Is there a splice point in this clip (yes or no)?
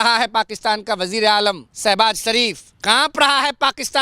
yes